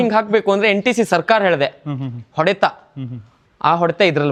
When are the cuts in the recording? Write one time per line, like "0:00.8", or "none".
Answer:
none